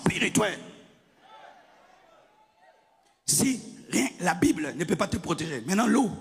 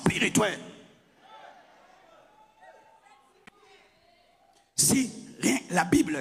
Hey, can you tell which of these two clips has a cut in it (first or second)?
first